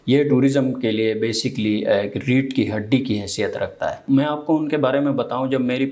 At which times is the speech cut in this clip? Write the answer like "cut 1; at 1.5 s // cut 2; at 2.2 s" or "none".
cut 1; at 4.0 s

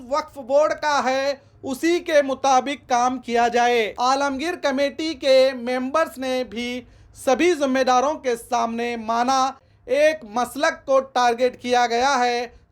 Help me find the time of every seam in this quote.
cut 1; at 3.9 s // cut 2; at 9.7 s

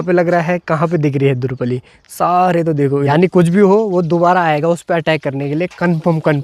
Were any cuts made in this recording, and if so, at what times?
cut 1; at 3.1 s

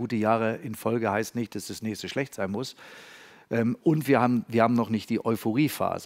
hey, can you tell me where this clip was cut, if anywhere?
none

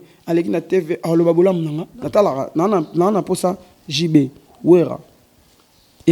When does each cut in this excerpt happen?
cut 1; at 1.9 s

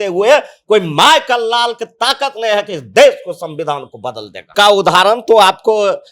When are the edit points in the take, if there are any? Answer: cut 1; at 4.5 s

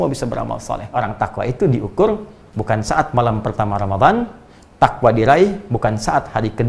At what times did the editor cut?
cut 1; at 0.9 s

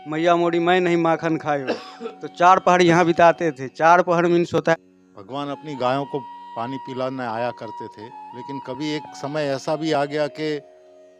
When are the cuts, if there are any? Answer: cut 1; at 4.7 s

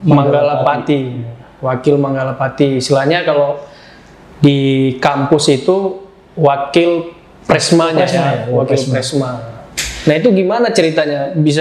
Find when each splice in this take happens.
none

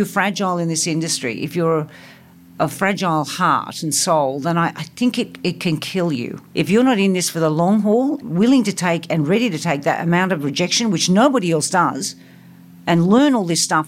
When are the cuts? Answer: cut 1; at 6.4 s // cut 2; at 8.2 s

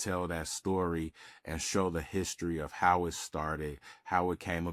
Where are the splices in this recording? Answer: none

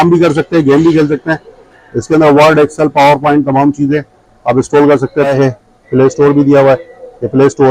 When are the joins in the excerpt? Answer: cut 1; at 5.3 s

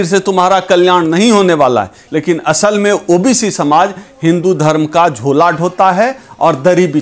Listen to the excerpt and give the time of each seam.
cut 1; at 2.0 s

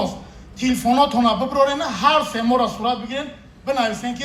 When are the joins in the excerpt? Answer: none

